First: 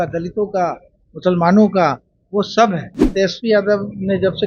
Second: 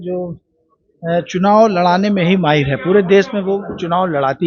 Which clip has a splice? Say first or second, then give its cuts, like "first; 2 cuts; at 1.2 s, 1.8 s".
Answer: first; 1 cut; at 3.1 s